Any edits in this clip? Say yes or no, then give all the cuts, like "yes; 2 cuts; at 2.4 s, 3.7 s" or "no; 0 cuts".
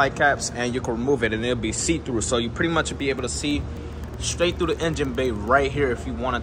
no; 0 cuts